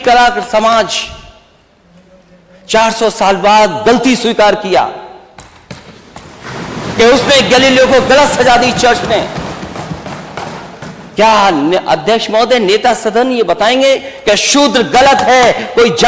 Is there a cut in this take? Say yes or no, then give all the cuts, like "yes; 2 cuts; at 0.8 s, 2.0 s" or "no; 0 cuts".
no; 0 cuts